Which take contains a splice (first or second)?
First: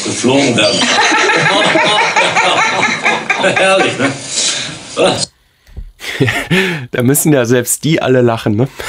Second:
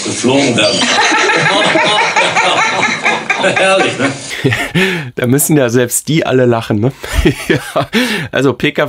second